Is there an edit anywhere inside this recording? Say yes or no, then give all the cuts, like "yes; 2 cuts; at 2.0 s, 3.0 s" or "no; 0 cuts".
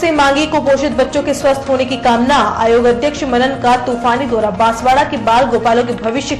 no; 0 cuts